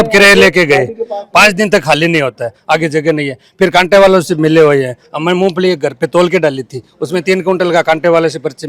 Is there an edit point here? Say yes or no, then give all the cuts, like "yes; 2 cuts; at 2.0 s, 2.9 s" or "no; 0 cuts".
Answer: no; 0 cuts